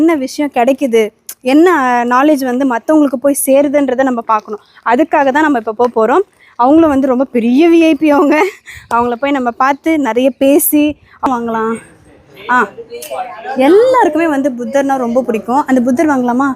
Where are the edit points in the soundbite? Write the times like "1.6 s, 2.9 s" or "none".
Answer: 11.3 s